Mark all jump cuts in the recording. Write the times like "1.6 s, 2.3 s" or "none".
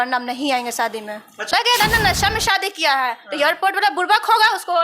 1.5 s